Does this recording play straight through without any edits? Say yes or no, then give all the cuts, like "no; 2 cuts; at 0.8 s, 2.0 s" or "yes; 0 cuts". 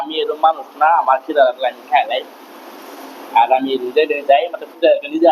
yes; 0 cuts